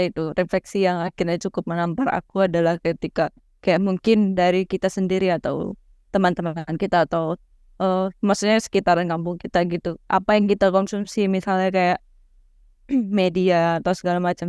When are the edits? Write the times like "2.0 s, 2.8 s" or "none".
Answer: none